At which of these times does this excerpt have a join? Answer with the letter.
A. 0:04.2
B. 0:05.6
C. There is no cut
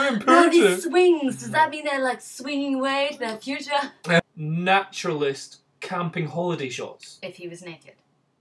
A